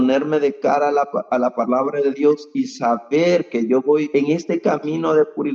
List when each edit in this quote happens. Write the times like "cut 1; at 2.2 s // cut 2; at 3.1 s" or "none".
cut 1; at 4.1 s